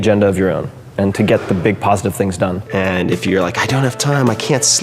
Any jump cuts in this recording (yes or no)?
yes